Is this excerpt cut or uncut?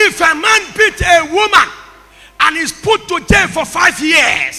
uncut